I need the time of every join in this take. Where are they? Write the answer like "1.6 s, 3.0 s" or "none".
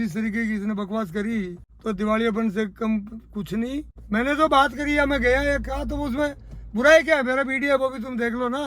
1.6 s, 3.9 s